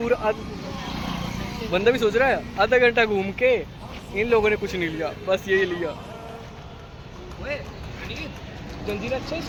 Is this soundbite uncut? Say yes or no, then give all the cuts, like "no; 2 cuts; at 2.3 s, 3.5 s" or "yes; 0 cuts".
yes; 0 cuts